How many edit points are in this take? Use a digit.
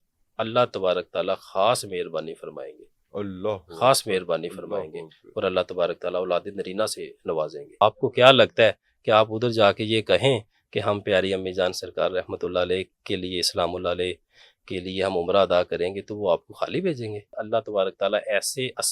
2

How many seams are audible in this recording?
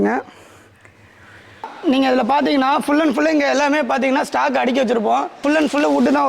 2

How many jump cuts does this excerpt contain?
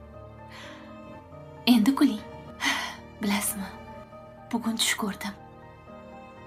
0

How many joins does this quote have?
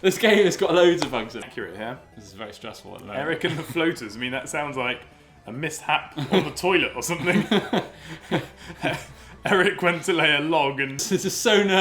2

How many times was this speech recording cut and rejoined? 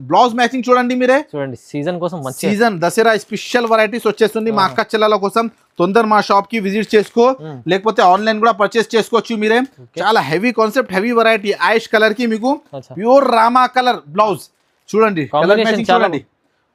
0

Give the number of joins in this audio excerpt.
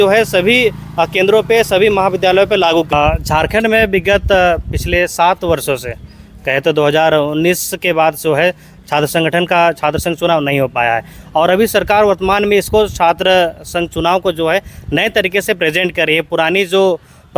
1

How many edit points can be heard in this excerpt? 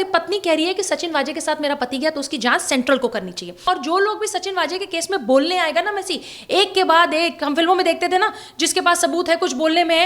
1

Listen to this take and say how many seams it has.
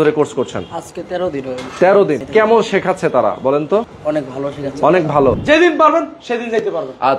3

